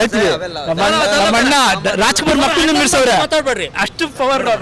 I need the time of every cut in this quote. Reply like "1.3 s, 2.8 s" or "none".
3.7 s